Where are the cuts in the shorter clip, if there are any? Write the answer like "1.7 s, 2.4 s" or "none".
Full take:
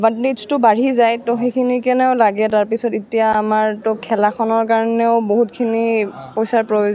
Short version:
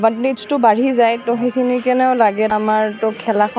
2.5 s